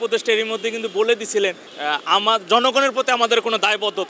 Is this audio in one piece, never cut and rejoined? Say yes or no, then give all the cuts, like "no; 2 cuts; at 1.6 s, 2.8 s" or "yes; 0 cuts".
yes; 0 cuts